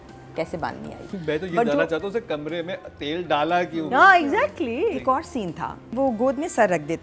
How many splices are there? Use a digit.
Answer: 2